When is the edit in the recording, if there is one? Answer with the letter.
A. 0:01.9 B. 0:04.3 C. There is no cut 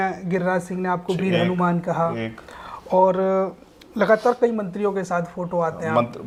C